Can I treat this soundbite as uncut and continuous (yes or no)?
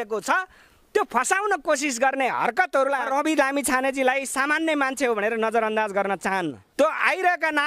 no